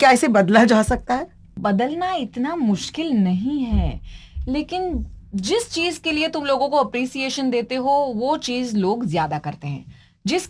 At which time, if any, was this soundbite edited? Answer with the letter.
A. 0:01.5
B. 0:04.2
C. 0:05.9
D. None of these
A